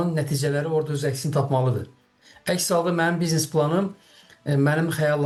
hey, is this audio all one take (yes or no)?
yes